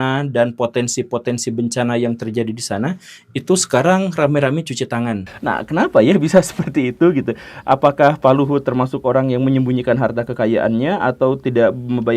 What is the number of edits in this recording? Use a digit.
1